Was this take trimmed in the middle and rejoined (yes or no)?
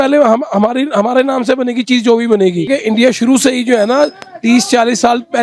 yes